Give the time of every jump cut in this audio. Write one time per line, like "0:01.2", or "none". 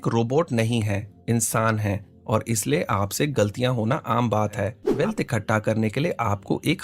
0:04.8